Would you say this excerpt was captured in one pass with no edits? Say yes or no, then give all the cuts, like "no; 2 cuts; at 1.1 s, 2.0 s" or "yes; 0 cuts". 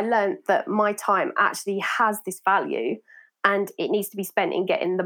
yes; 0 cuts